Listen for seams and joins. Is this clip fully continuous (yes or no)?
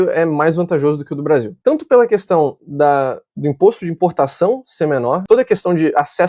no